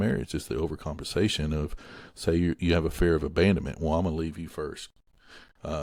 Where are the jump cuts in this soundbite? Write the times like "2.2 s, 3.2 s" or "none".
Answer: none